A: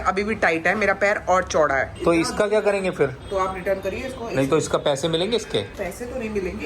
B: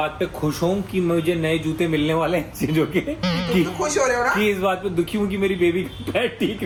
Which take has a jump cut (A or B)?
A